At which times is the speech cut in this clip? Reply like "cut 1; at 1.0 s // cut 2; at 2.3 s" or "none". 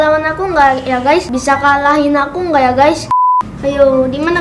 cut 1; at 3.0 s